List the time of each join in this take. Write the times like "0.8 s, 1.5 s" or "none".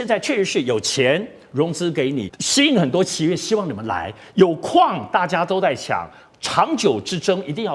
2.4 s